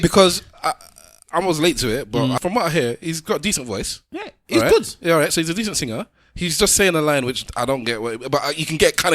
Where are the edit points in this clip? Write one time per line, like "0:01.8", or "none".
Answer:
0:02.4